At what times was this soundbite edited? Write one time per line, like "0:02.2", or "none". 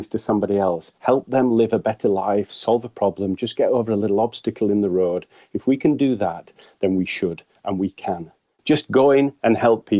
0:08.5